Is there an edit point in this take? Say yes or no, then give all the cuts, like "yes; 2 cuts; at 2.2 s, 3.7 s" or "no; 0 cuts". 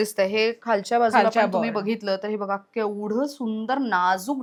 no; 0 cuts